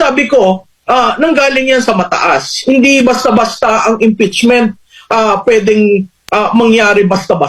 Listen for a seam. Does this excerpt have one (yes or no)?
no